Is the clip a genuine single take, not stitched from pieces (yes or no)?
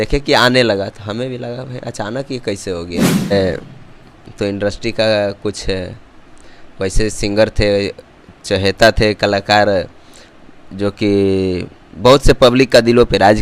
no